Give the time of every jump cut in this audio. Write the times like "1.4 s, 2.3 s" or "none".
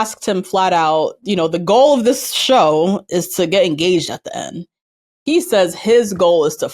none

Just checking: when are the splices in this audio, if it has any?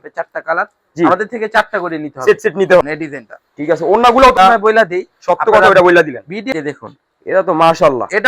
2.8 s, 4.4 s, 6.5 s

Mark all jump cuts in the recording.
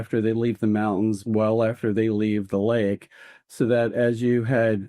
none

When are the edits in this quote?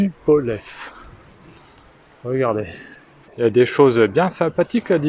3.2 s

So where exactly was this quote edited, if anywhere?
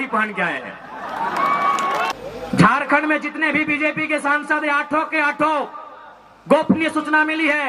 2.2 s

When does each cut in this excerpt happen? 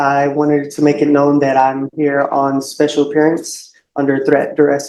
none

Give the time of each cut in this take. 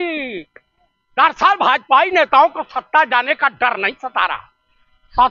none

